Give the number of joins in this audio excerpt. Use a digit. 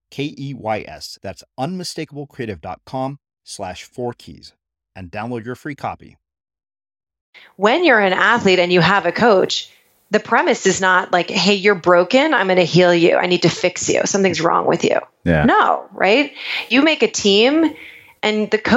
1